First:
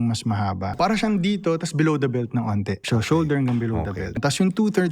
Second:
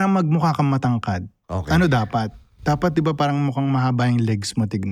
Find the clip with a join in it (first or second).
first